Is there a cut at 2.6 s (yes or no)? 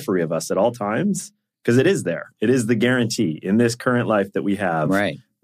no